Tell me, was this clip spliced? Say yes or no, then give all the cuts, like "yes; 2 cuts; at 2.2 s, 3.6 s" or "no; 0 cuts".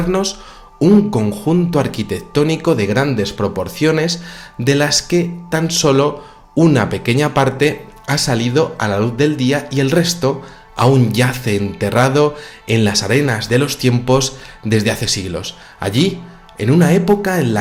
no; 0 cuts